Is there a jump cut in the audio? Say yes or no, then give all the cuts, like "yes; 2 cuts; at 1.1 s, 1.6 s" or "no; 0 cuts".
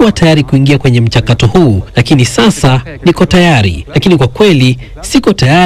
yes; 2 cuts; at 1.9 s, 3.8 s